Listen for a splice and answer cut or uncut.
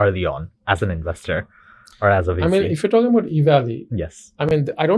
uncut